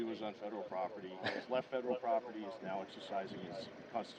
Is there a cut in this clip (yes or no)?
no